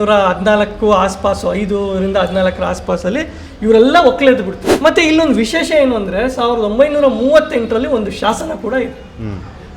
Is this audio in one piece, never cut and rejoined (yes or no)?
no